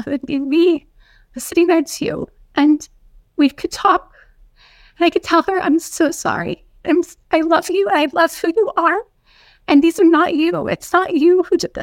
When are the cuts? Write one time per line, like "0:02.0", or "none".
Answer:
none